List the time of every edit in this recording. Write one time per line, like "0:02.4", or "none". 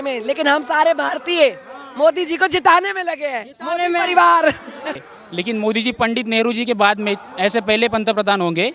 0:05.1